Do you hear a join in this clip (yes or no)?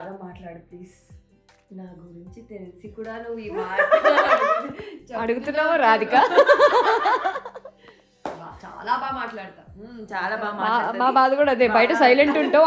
no